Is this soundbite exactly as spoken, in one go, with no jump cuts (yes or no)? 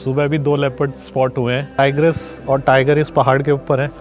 no